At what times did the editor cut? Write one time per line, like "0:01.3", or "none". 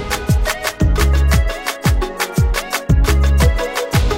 none